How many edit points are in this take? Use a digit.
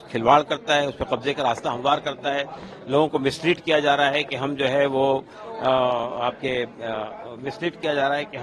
0